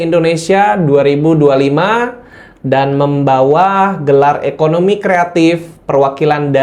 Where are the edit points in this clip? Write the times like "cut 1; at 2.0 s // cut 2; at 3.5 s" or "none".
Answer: none